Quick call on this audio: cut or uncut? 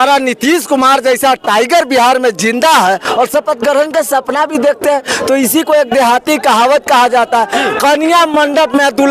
uncut